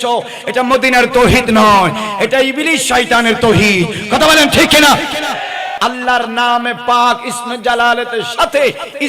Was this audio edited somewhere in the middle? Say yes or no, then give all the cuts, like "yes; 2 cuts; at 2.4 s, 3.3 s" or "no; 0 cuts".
yes; 1 cut; at 5.8 s